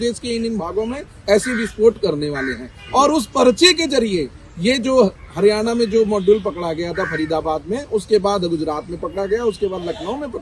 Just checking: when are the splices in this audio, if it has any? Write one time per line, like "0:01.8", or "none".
none